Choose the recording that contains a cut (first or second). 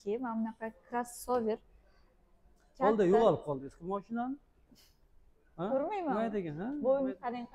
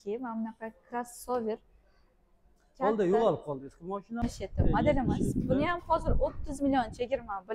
second